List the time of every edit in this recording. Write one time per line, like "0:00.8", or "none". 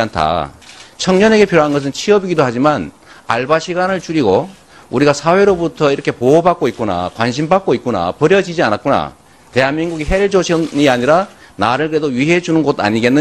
0:06.6